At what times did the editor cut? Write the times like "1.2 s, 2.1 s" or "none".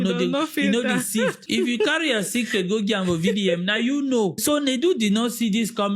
1.4 s, 4.4 s